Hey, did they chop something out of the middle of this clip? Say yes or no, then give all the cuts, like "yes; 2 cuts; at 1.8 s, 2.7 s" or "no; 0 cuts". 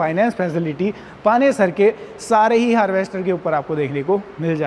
no; 0 cuts